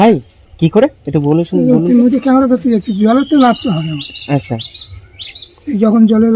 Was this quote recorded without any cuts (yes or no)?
yes